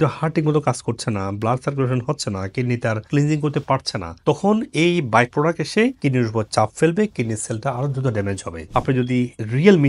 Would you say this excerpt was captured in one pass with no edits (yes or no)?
no